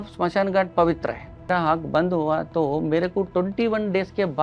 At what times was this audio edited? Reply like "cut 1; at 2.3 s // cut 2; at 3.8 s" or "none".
cut 1; at 1.5 s